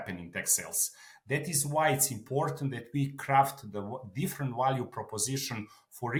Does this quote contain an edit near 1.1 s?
no; 0 cuts

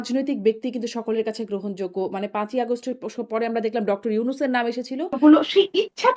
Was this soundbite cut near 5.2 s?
yes; 1 cut; at 5.2 s

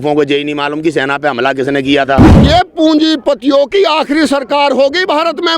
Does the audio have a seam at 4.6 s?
no; 1 cut; at 2.4 s

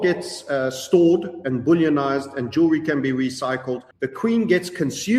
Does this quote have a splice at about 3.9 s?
yes; 1 cut; at 3.9 s

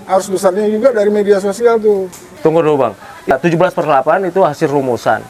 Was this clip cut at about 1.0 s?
no; 2 cuts; at 2.2 s, 3.3 s

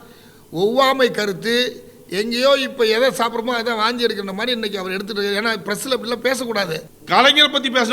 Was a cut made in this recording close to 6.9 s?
yes; 1 cut; at 6.9 s

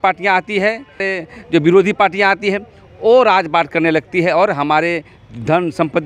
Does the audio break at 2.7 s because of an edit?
no; 1 cut; at 1.0 s

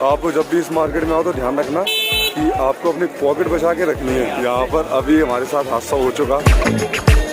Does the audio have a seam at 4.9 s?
no; 1 cut; at 6.4 s

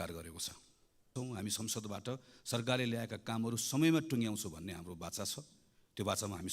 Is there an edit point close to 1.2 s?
yes; 1 cut; at 1.2 s

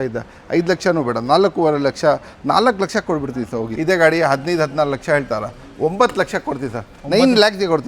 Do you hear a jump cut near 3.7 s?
yes; 1 cut; at 3.7 s

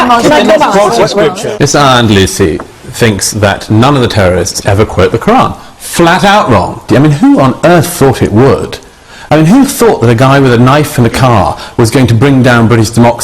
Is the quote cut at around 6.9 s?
yes; 2 cuts; at 1.5 s, 6.9 s

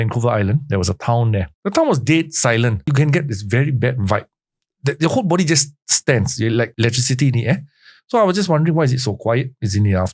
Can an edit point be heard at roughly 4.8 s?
no; 3 cuts; at 1.5 s, 2.9 s, 6.7 s

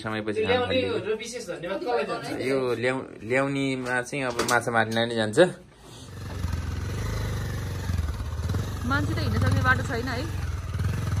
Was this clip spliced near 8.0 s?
no; 1 cut; at 6.2 s

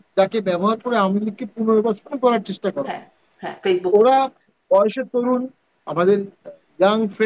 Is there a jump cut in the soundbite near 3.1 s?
no; 0 cuts

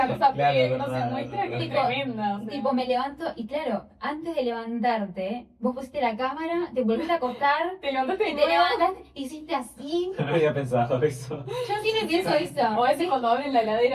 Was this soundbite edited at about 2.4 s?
no; 0 cuts

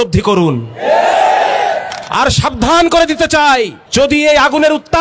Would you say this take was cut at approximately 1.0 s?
no; 1 cut; at 3.8 s

